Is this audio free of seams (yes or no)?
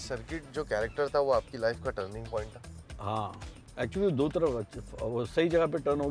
yes